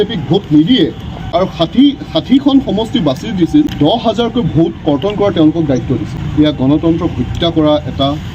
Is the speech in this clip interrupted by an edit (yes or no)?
yes